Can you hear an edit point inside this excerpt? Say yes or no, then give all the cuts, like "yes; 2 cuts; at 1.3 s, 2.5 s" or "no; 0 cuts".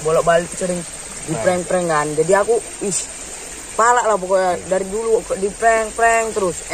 no; 0 cuts